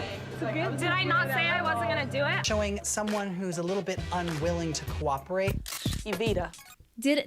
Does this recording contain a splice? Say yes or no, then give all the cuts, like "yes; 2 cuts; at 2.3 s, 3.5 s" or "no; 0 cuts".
yes; 1 cut; at 2.4 s